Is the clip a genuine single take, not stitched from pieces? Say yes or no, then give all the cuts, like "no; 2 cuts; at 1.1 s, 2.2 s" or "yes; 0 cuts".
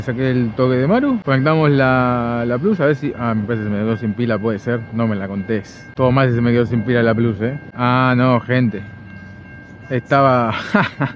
yes; 0 cuts